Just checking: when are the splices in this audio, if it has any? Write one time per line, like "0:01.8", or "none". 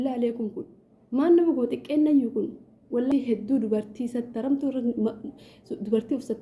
0:03.1